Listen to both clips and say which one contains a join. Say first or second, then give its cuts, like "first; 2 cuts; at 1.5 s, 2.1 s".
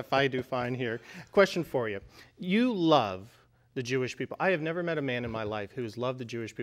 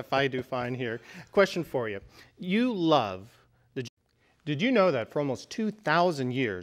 first; 1 cut; at 3.8 s